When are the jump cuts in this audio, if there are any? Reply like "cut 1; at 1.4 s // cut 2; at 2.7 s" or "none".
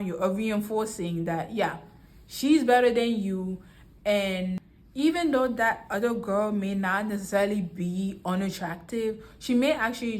cut 1; at 4.8 s

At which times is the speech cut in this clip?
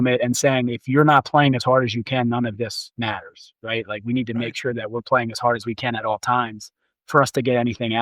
none

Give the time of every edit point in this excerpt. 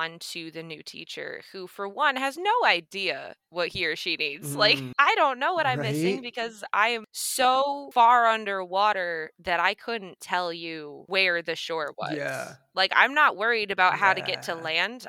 none

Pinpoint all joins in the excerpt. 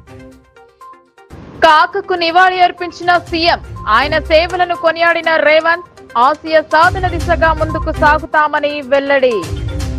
cut 1; at 1.3 s

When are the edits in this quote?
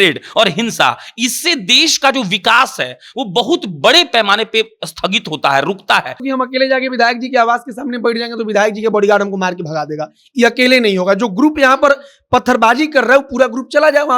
cut 1; at 6.2 s

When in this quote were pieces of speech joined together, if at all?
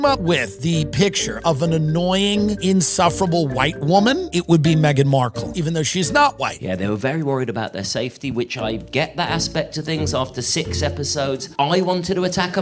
cut 1; at 6.6 s

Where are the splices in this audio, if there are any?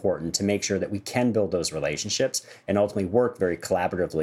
none

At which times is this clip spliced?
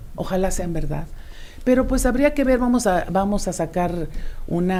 none

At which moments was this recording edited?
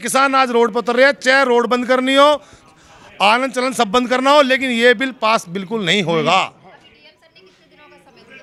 none

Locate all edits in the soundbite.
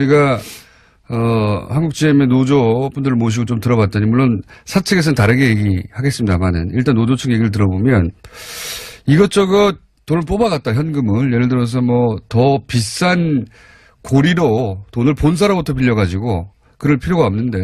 cut 1; at 13.3 s

